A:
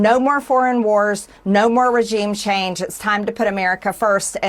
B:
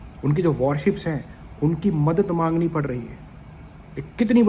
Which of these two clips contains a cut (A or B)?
B